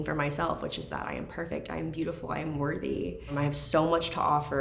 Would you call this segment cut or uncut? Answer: cut